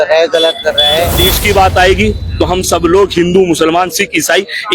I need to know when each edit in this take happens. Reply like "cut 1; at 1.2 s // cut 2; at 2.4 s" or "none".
cut 1; at 1.3 s